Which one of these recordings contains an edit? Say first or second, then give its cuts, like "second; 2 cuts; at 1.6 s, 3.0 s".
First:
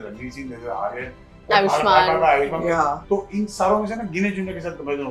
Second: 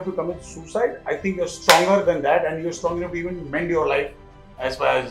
first; 1 cut; at 2.8 s